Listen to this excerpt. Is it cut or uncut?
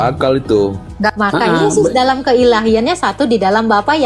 cut